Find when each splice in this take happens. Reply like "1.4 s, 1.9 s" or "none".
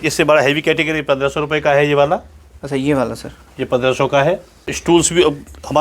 none